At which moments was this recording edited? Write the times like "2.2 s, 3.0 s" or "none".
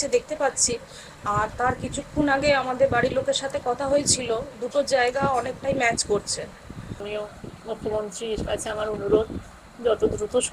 6.9 s